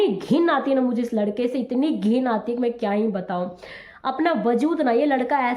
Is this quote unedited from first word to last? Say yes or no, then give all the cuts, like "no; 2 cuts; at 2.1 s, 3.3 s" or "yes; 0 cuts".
yes; 0 cuts